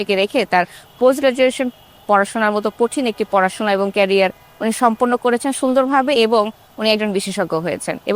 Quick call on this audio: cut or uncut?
uncut